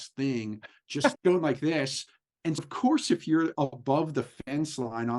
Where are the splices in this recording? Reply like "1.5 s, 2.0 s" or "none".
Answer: 1.2 s, 2.6 s

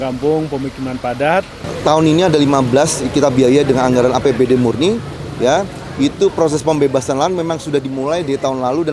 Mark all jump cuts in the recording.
1.6 s

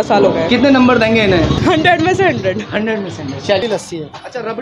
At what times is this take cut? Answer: 1.6 s, 3.6 s

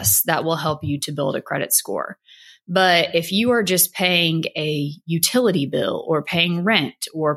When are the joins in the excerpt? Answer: none

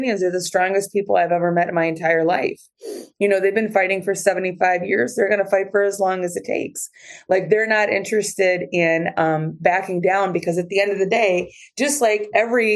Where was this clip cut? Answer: none

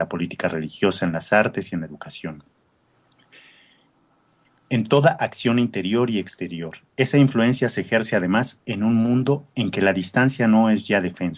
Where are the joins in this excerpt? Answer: 1.7 s

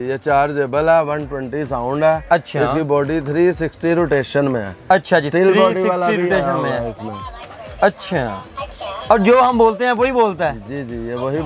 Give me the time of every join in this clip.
none

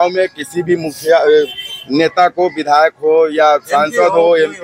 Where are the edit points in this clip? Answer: none

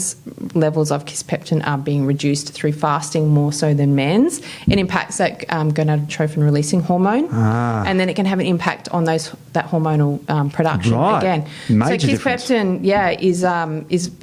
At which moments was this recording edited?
none

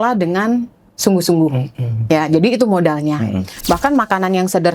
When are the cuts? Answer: 3.5 s

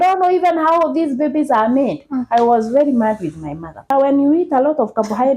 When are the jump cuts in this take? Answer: 3.9 s

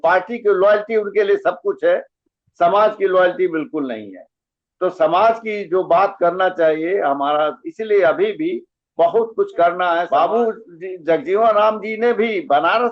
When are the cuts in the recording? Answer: 10.1 s

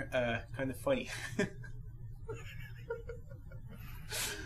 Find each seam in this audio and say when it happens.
2.3 s

